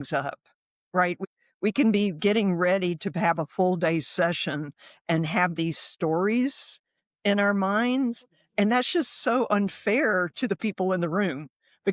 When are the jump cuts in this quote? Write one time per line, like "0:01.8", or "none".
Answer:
0:01.2